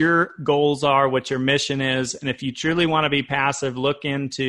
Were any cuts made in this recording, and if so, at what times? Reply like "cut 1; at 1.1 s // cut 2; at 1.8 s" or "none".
none

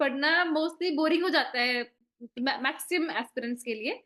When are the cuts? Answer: none

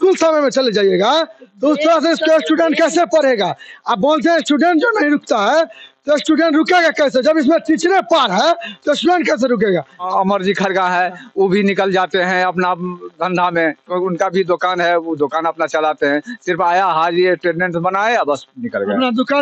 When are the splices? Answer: cut 1; at 10.1 s

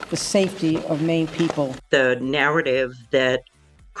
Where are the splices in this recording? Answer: cut 1; at 1.8 s

